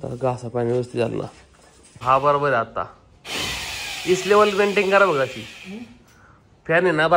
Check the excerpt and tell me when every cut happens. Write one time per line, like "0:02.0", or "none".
0:02.0